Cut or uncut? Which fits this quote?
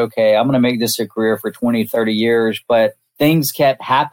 cut